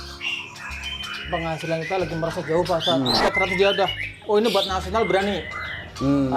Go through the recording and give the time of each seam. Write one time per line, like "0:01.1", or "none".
0:03.2